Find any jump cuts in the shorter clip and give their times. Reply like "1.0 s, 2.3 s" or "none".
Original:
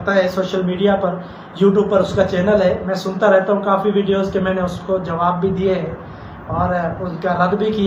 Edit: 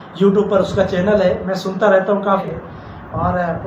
2.4 s